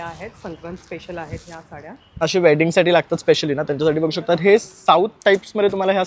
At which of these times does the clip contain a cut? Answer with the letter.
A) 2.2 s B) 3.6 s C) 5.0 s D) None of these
A